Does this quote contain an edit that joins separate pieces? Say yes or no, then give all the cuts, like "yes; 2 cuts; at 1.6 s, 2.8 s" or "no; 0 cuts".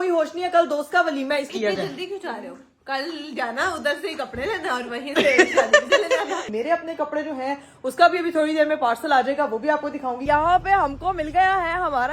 yes; 3 cuts; at 1.5 s, 6.4 s, 10.2 s